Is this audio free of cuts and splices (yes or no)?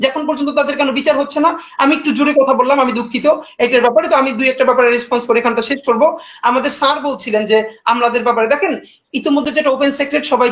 yes